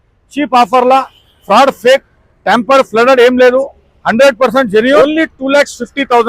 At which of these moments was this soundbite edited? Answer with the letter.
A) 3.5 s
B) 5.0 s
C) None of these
B